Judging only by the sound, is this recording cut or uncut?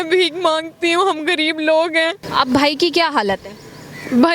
cut